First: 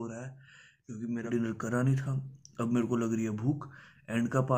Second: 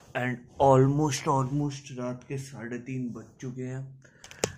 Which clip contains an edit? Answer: first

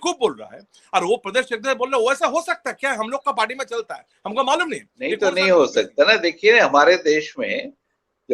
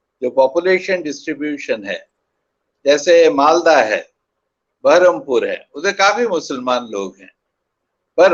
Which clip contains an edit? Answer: first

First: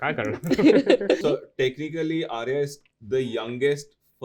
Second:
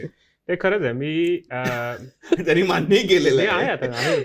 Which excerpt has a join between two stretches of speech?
first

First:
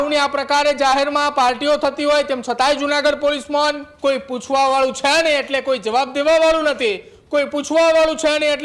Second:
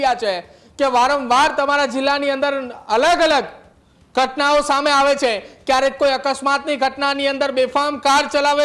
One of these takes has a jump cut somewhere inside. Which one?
first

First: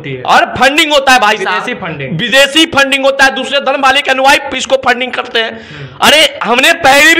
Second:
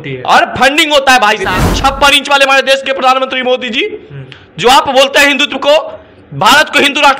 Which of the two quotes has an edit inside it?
second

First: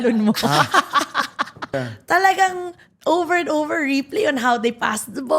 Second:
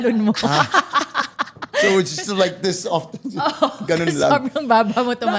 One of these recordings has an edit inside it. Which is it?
first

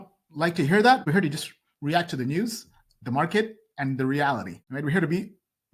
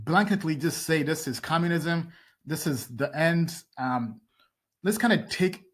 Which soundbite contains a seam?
first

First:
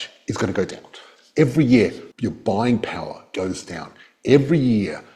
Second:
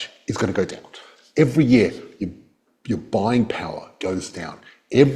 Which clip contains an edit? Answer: first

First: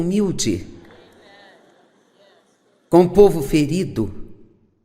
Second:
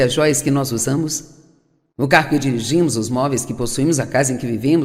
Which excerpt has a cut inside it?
second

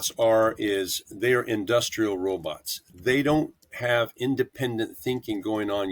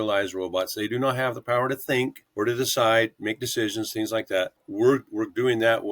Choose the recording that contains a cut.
second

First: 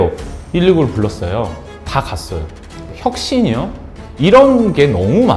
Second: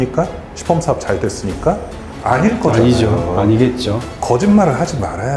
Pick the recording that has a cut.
second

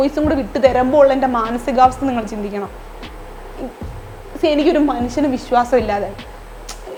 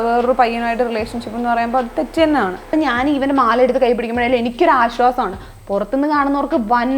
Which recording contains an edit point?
second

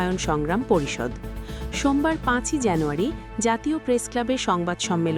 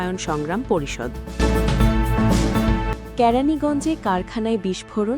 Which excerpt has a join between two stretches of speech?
second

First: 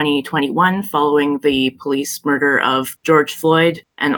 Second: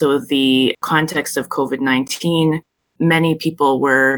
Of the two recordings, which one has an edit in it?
second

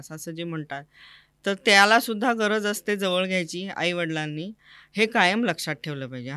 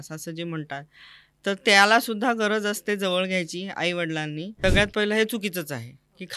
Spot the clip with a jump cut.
second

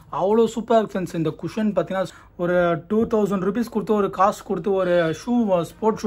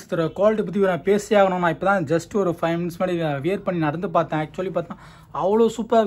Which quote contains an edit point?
first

